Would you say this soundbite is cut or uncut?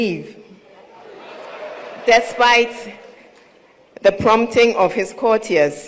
uncut